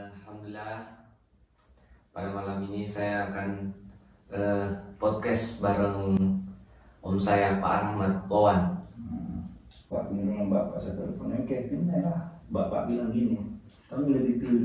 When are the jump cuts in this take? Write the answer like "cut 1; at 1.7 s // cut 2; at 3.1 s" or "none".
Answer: cut 1; at 9.9 s

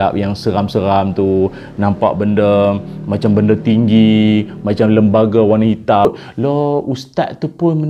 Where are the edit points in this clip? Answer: cut 1; at 6.0 s

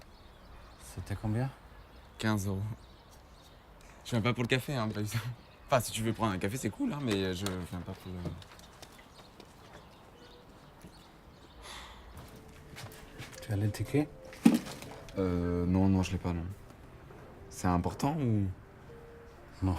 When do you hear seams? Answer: cut 1; at 2.5 s

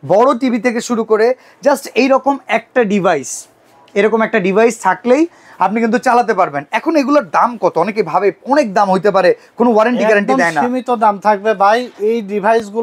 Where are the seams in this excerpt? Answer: none

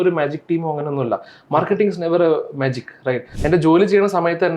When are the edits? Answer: cut 1; at 3.3 s

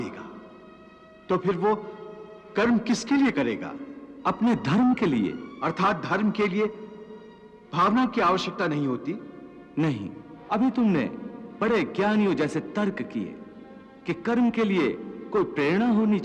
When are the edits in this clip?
cut 1; at 5.5 s // cut 2; at 10.3 s

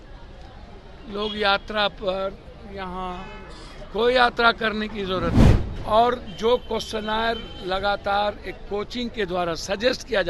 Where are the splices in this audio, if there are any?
cut 1; at 5.6 s

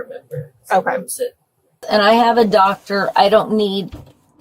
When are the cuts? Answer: cut 1; at 1.8 s

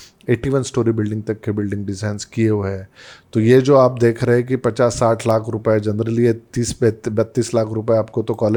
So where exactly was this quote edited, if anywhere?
none

